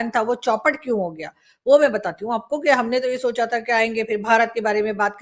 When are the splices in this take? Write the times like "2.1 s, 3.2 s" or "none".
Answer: none